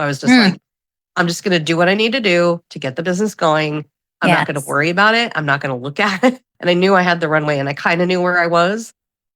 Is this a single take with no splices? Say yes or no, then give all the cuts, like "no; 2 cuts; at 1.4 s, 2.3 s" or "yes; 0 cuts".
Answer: no; 1 cut; at 6.5 s